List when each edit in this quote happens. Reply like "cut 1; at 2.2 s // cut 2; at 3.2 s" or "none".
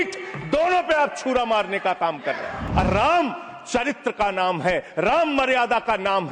cut 1; at 2.6 s